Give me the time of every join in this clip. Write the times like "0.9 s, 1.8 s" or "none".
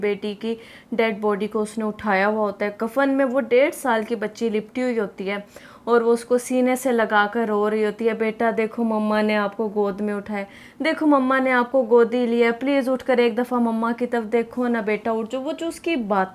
none